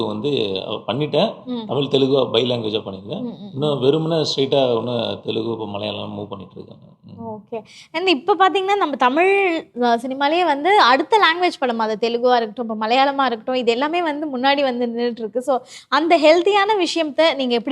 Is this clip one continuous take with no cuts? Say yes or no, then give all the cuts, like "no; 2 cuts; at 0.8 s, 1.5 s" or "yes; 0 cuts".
yes; 0 cuts